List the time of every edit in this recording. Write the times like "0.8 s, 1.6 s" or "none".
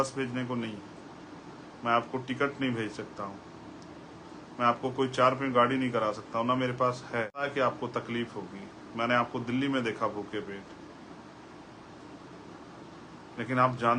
7.4 s